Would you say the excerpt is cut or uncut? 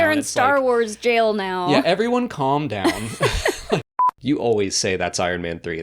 cut